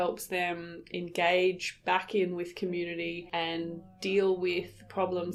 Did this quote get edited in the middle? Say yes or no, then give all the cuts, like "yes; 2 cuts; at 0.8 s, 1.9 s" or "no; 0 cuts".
no; 0 cuts